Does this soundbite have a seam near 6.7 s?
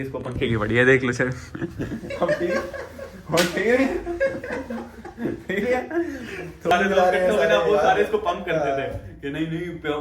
yes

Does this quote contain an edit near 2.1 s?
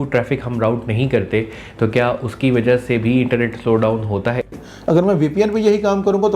no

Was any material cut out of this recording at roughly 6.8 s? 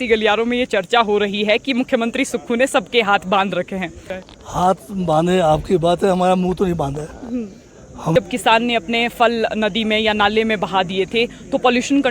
no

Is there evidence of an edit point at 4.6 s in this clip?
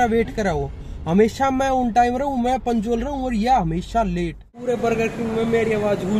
yes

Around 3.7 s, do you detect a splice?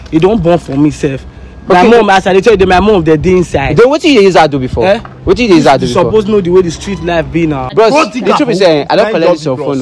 no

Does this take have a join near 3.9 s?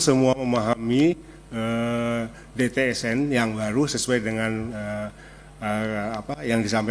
no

